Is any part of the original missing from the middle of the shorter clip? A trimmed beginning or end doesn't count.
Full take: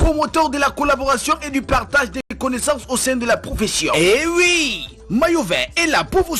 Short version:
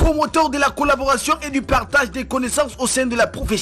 yes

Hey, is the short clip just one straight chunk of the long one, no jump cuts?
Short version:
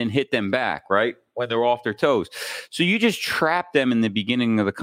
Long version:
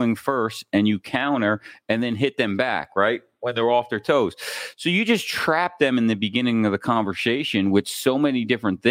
yes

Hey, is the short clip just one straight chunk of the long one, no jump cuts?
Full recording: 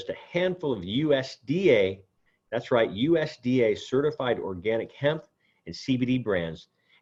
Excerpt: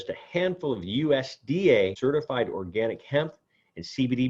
no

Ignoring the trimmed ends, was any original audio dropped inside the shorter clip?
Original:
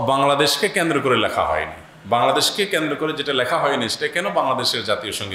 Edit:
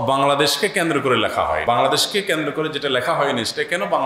yes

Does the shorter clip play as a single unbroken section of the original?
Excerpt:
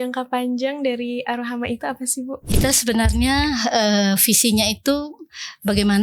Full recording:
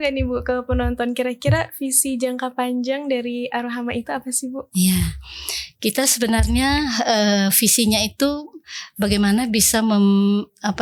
no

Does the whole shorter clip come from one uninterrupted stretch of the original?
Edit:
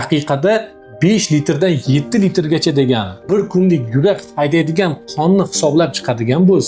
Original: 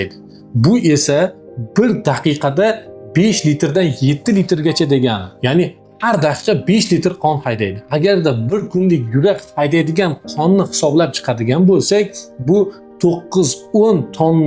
no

